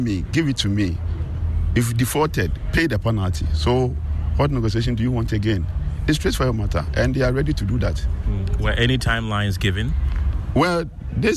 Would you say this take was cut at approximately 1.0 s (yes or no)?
no